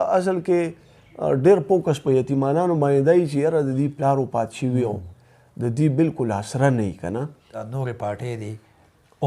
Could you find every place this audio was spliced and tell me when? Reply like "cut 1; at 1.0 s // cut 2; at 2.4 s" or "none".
cut 1; at 7.6 s

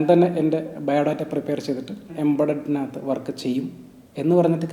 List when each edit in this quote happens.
cut 1; at 2.1 s

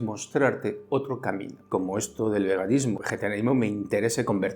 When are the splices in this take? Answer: cut 1; at 1.7 s // cut 2; at 3.0 s

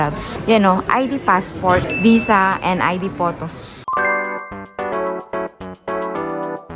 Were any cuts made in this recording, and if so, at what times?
none

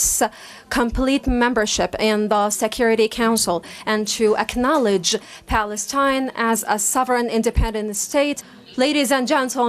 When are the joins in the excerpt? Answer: cut 1; at 8.5 s

